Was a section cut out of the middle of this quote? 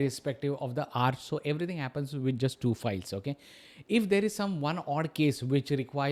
no; 0 cuts

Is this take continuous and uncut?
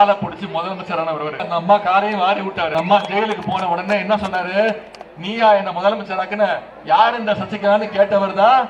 no; 2 cuts; at 1.5 s, 2.7 s

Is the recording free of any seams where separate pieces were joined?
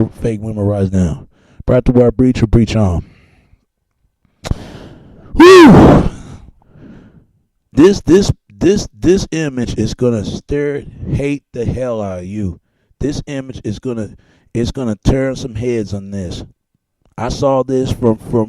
no; 1 cut; at 15.2 s

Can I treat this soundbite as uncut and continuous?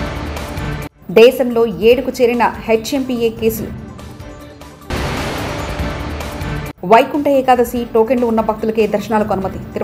no; 1 cut; at 0.9 s

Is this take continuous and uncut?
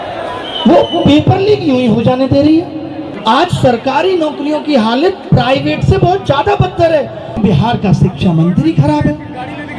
no; 2 cuts; at 3.0 s, 7.4 s

